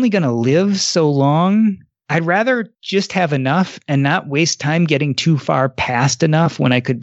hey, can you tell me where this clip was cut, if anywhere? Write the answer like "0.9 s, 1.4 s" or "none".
1.9 s, 2.8 s